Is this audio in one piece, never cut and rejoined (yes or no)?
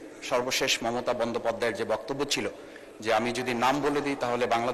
yes